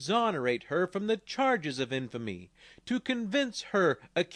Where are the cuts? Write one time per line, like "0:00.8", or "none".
0:01.3